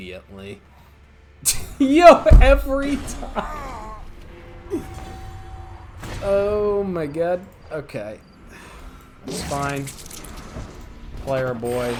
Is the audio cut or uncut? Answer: uncut